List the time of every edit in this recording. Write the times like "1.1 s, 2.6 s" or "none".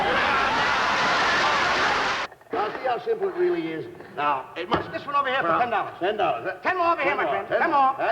2.2 s